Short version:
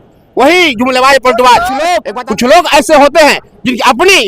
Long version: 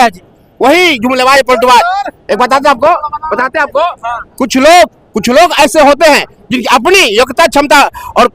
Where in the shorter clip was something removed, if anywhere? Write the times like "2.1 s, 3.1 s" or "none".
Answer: 2.1 s

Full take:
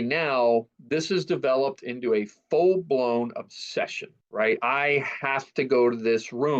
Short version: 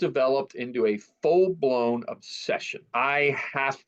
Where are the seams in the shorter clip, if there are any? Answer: 2.9 s

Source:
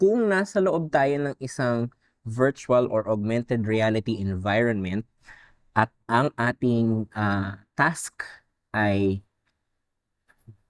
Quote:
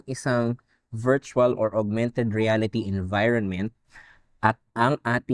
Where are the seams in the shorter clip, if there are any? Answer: none

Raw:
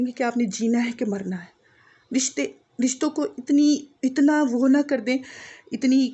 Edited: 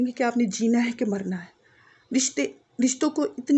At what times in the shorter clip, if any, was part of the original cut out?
none

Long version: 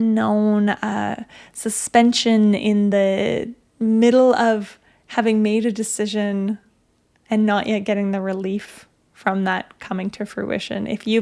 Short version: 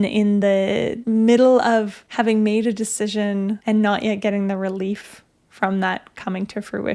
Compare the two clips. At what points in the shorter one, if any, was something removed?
0.9 s, 2.0 s, 3.6 s

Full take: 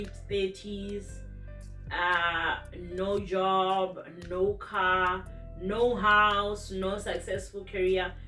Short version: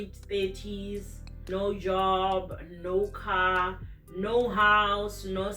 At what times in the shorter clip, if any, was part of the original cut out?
1.3 s

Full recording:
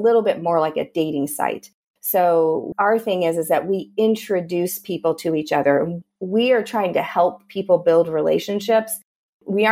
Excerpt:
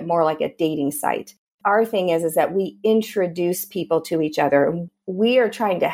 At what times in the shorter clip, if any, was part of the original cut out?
1.5 s

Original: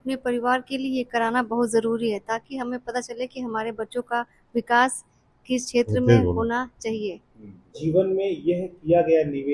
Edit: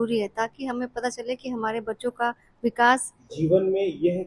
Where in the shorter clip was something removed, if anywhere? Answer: 3.2 s

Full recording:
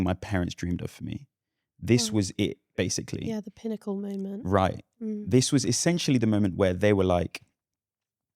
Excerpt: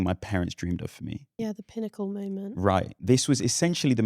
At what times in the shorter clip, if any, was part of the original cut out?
1.3 s, 3.0 s

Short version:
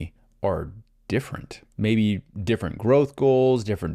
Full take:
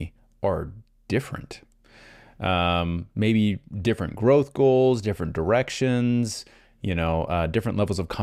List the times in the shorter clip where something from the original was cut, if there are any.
1.7 s

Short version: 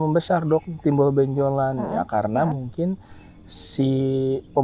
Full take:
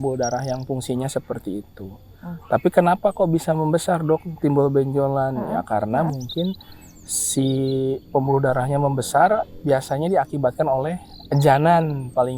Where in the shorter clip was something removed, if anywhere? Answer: none

